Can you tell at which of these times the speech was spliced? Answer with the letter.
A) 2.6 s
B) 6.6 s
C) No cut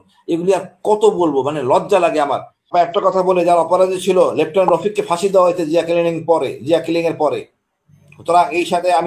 A